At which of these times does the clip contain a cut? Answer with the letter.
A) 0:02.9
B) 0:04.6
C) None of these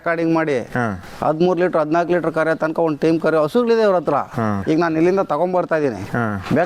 B